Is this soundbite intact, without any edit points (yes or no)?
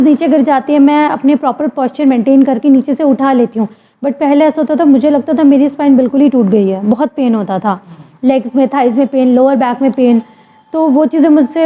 yes